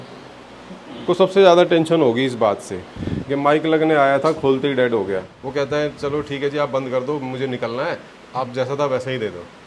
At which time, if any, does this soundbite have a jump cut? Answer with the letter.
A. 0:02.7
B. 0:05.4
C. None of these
B